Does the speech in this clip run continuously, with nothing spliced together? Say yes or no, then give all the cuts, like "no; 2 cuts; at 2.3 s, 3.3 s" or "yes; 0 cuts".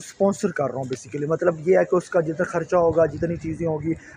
yes; 0 cuts